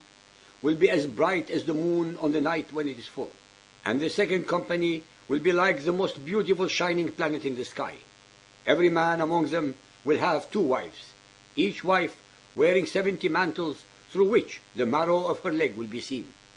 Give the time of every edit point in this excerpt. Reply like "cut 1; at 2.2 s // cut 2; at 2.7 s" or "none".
cut 1; at 1.5 s